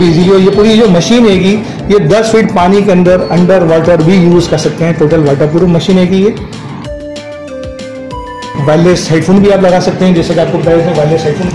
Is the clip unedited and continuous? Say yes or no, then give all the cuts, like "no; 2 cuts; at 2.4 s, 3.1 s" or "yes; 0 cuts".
yes; 0 cuts